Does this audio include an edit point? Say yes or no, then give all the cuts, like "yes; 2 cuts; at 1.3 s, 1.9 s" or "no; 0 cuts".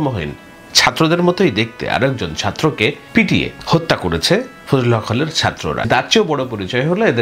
yes; 2 cuts; at 3.3 s, 5.9 s